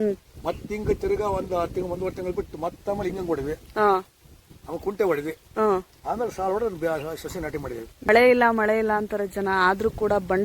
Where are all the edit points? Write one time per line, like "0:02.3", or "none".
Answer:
0:08.1